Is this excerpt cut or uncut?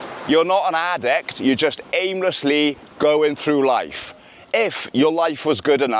uncut